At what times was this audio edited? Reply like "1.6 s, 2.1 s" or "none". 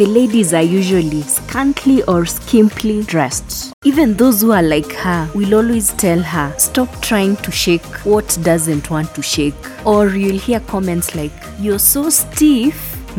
3.5 s